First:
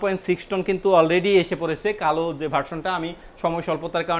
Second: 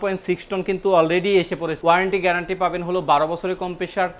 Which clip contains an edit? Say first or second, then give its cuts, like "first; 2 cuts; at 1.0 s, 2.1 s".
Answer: second; 1 cut; at 1.8 s